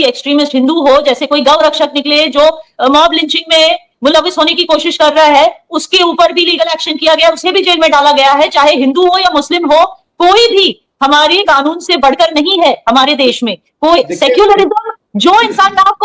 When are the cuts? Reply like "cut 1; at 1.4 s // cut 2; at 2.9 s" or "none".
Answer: none